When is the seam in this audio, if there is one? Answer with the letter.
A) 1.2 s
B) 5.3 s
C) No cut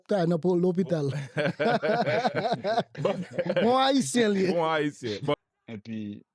B